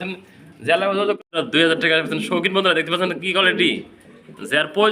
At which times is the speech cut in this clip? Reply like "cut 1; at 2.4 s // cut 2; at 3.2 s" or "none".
cut 1; at 1.2 s